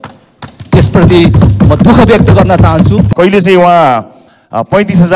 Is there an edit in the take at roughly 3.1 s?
yes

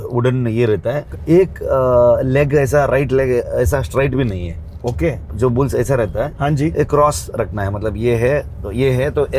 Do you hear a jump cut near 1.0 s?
yes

